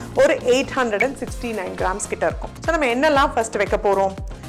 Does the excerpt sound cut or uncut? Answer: cut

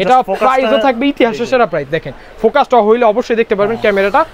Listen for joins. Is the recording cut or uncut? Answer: uncut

